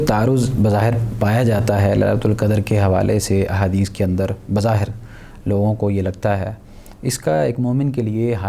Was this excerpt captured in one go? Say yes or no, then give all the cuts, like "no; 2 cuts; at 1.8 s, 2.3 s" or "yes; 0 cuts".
yes; 0 cuts